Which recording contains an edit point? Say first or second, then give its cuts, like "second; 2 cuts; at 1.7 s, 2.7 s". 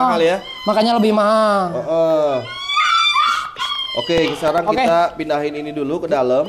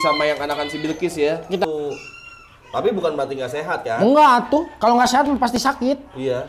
second; 1 cut; at 1.6 s